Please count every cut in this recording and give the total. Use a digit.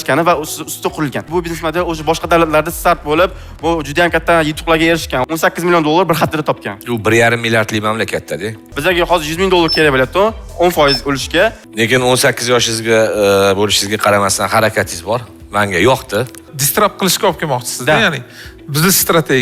5